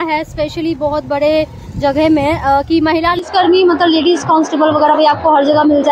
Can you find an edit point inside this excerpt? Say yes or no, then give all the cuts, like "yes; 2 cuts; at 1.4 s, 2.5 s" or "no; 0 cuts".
yes; 1 cut; at 3.2 s